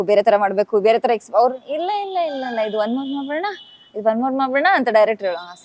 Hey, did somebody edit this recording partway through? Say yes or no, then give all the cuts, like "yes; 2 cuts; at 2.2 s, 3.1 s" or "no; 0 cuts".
no; 0 cuts